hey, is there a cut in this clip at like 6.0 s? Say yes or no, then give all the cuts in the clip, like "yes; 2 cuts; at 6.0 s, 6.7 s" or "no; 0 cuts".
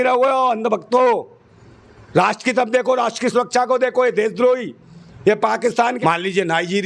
yes; 1 cut; at 6.0 s